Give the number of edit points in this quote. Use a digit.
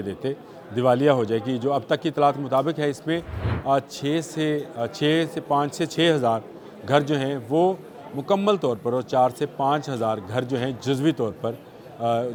0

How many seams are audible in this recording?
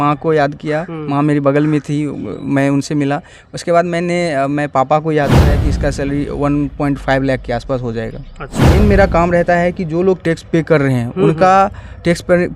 2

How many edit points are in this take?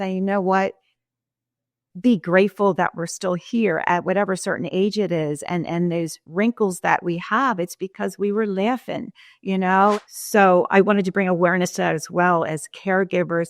1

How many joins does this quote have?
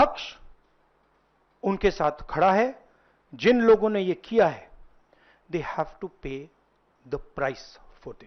0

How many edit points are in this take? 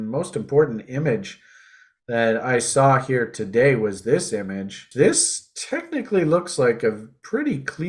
1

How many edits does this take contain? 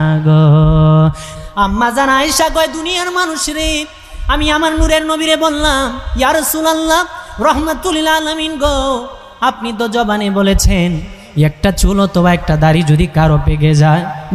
1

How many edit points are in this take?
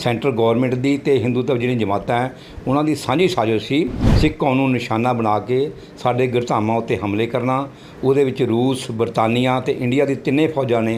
1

